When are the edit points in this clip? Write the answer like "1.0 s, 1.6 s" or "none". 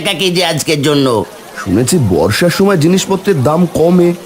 1.4 s